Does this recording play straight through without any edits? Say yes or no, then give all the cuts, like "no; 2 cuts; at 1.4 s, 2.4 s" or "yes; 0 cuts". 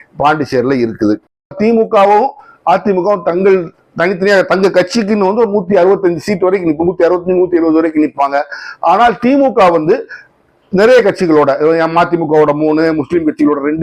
no; 1 cut; at 1.5 s